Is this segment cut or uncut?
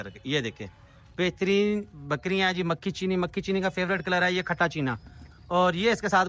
uncut